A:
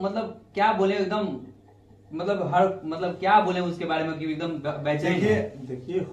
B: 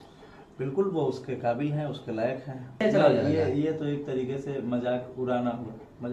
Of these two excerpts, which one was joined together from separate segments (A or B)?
B